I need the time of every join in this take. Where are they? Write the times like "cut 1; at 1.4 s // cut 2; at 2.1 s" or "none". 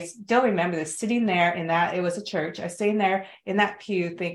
none